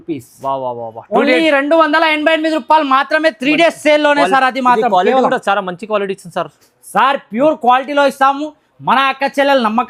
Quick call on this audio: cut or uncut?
uncut